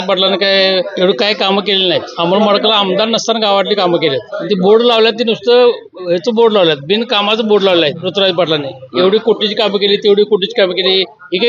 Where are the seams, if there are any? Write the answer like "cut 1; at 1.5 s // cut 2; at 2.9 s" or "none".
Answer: cut 1; at 0.9 s // cut 2; at 2.1 s // cut 3; at 4.3 s // cut 4; at 8.0 s